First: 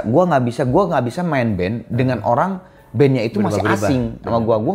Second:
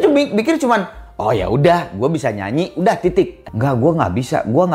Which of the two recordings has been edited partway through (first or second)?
second